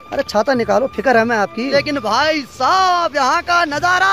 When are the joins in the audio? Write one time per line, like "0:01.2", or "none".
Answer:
0:01.7